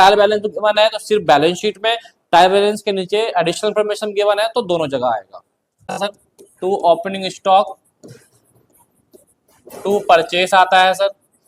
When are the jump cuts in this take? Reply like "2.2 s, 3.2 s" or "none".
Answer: 6.0 s